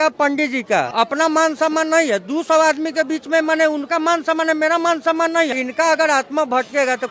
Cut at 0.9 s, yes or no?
yes